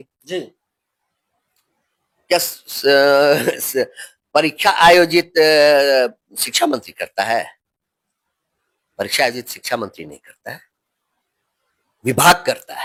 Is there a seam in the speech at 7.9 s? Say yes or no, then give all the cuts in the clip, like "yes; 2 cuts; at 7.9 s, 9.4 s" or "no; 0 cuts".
no; 0 cuts